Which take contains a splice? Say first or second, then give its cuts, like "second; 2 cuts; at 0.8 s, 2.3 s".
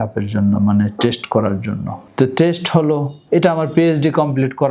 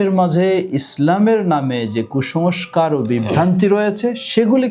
first; 2 cuts; at 2.0 s, 3.1 s